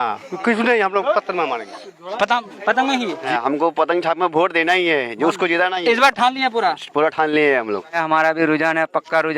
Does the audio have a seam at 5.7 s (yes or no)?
no